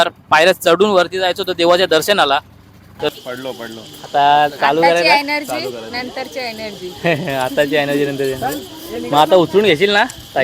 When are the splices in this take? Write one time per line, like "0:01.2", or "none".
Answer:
0:03.1